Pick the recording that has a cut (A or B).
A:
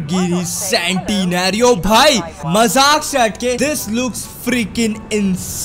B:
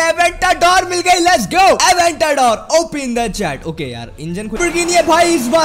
B